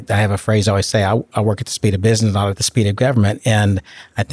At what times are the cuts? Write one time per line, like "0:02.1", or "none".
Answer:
0:02.6

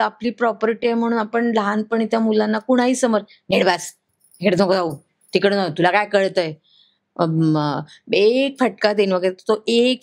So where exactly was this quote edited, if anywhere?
none

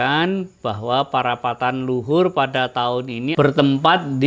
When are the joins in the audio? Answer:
0:03.3

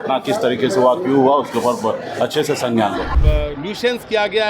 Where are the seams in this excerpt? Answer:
0:03.1

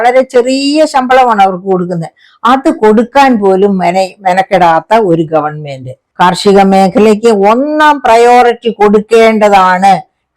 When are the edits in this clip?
0:06.0

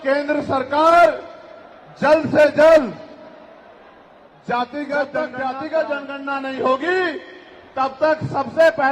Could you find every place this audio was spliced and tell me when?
0:05.2

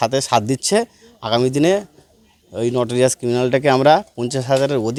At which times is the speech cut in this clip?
none

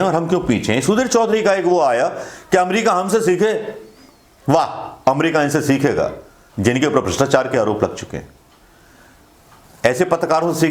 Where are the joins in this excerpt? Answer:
none

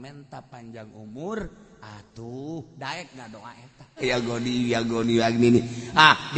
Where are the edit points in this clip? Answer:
0:04.0

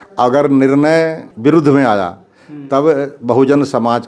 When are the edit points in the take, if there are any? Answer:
0:01.2

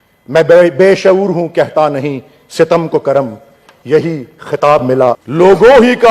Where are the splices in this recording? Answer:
0:04.9

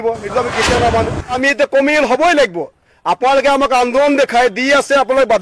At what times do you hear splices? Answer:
0:01.4

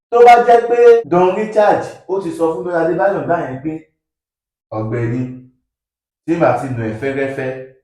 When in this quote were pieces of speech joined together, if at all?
0:01.0

